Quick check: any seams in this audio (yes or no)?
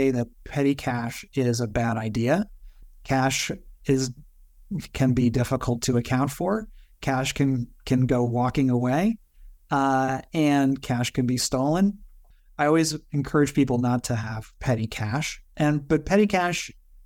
no